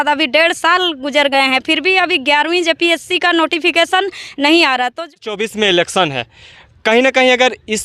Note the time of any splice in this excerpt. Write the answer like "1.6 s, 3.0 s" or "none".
5.3 s